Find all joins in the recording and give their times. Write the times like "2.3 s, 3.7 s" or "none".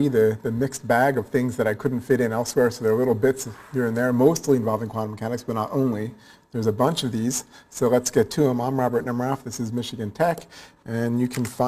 2.0 s